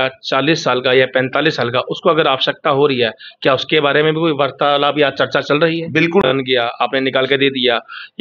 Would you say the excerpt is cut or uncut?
cut